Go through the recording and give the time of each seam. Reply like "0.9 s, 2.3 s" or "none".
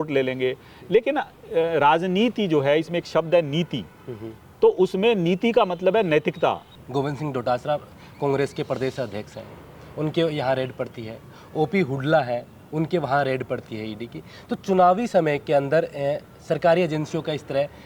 6.7 s